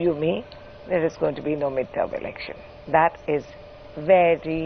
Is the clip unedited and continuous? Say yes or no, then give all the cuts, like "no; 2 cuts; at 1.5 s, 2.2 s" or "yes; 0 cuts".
yes; 0 cuts